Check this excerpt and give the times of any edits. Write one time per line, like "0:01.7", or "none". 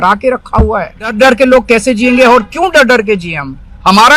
0:01.1